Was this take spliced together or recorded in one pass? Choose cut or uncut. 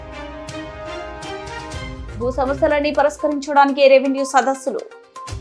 cut